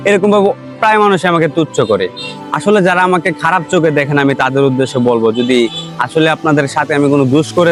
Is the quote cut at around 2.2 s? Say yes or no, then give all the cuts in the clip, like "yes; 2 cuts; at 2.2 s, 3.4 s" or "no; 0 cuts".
no; 0 cuts